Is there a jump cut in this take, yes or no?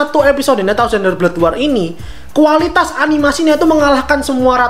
no